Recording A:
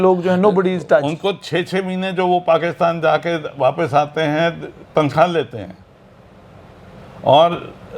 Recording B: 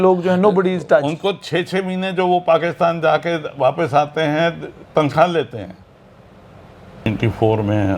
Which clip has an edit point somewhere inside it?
B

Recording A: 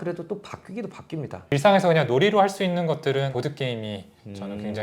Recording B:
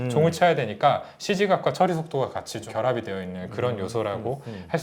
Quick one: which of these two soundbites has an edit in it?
A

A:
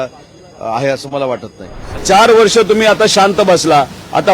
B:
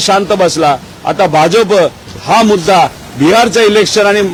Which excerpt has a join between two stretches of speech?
A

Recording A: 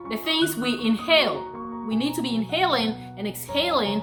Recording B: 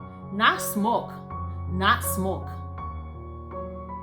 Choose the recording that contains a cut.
B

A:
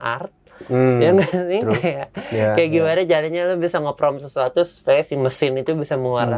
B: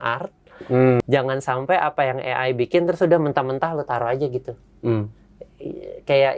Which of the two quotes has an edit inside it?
B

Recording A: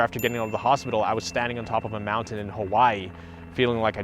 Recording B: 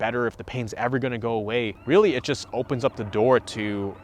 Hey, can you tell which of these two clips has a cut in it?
B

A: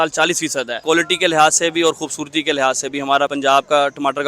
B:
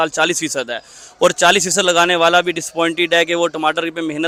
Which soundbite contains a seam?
A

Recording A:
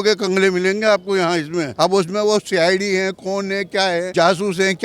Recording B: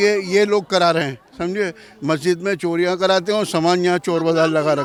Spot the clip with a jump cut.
A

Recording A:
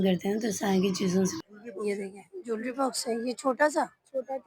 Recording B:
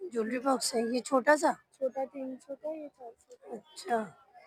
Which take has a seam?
A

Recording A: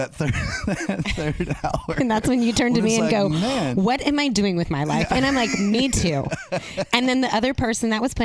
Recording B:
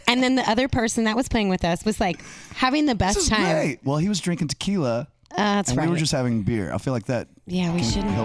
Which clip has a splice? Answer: B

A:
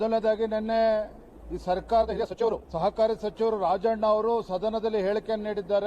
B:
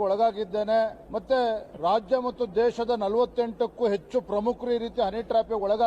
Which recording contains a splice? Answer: A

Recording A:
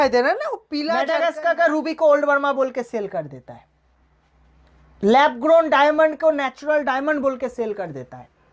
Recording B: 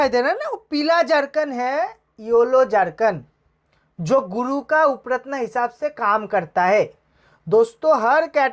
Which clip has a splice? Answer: A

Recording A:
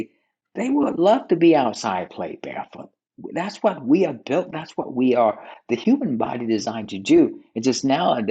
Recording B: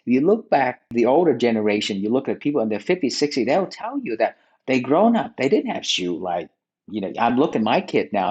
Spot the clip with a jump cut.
B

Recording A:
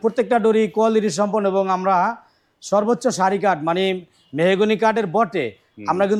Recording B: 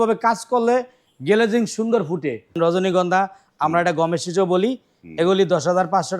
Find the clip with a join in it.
B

